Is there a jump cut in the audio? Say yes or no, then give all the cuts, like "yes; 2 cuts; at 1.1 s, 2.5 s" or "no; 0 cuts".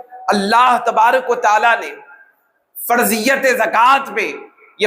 no; 0 cuts